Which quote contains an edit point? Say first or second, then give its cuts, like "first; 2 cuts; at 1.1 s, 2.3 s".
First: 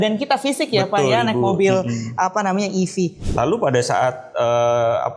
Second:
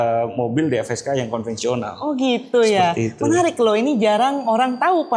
first; 1 cut; at 3.2 s